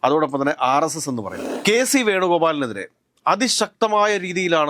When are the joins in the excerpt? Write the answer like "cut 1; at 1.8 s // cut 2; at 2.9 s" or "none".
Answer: cut 1; at 1.4 s